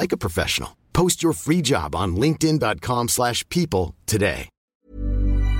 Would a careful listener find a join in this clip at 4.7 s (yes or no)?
yes